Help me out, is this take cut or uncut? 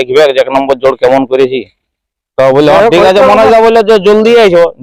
uncut